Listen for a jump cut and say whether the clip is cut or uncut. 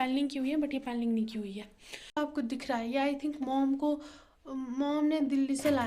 cut